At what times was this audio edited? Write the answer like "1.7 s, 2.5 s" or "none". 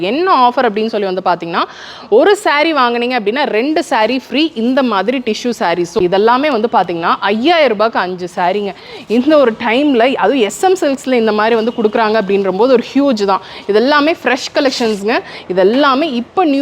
5.9 s